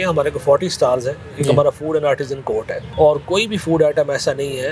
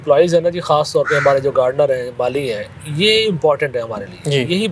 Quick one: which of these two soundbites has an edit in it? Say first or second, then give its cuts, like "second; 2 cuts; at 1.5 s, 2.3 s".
first; 1 cut; at 2.8 s